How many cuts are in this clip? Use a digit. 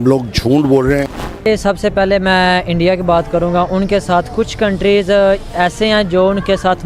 1